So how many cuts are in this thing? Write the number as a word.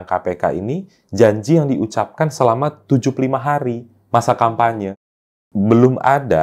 one